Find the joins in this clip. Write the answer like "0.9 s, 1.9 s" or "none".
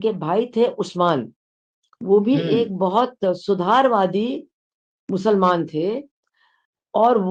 none